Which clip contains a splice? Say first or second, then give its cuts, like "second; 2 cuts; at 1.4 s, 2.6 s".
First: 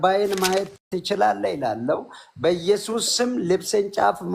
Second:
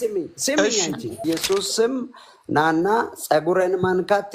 second; 1 cut; at 1.2 s